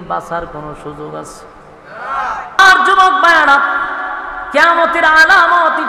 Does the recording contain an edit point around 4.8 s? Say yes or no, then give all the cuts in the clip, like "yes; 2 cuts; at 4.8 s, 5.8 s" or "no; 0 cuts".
no; 1 cut; at 2.6 s